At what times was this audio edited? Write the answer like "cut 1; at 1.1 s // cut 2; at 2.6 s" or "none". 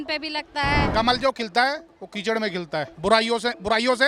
cut 1; at 0.9 s // cut 2; at 2.9 s